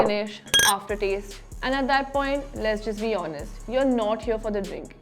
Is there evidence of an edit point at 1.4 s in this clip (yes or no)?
yes